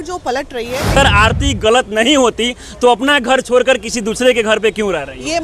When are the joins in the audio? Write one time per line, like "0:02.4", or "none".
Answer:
0:01.0